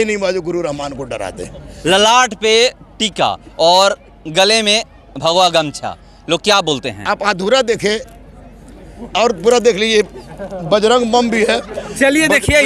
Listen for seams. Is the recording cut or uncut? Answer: uncut